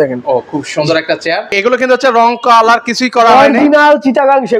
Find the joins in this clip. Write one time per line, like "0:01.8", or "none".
0:01.5

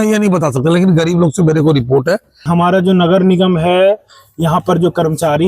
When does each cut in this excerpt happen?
0:02.5

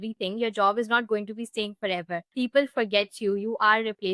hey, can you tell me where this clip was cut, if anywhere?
0:02.3

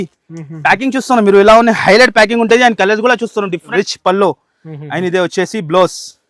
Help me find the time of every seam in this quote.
0:03.7

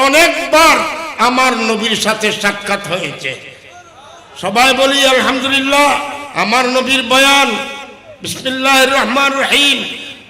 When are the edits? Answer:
0:06.2

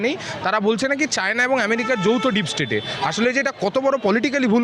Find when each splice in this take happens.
none

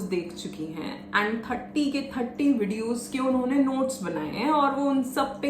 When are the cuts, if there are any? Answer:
none

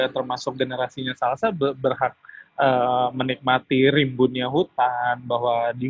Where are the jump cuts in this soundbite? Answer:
none

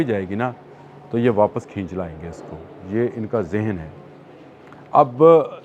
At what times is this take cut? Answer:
none

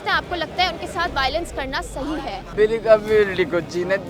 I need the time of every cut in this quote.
0:02.5

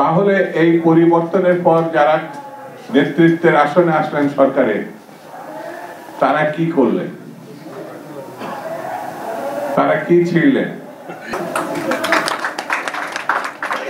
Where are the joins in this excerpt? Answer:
none

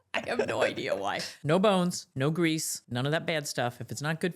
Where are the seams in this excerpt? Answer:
0:01.3
0:02.0
0:02.8

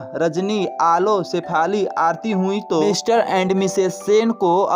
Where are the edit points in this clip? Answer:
0:02.8

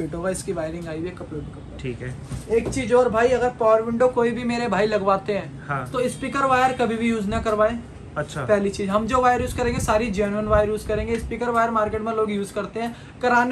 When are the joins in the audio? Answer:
none

